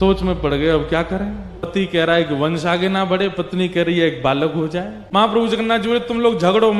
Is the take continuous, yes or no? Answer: no